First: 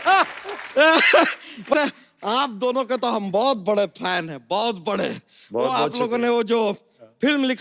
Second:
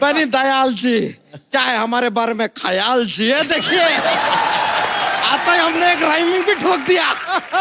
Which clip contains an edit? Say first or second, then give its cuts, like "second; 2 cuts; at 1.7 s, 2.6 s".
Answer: first; 1 cut; at 1.7 s